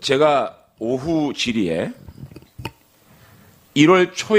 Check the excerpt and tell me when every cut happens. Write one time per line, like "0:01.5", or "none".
none